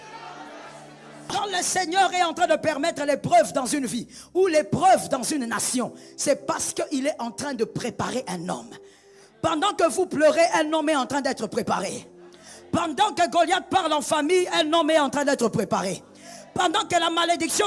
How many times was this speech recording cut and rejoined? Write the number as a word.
one